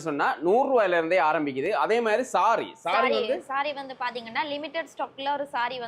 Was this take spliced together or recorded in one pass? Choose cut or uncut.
uncut